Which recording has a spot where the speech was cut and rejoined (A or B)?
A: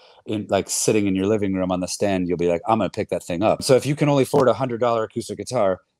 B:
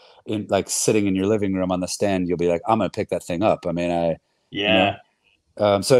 A